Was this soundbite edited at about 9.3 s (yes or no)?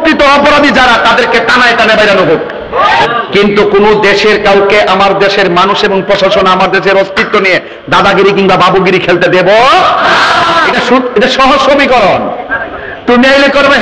no